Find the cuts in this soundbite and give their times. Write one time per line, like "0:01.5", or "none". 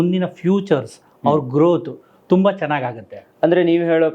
none